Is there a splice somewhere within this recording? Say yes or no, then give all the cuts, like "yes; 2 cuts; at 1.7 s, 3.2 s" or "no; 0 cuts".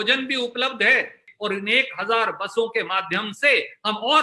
yes; 1 cut; at 1.3 s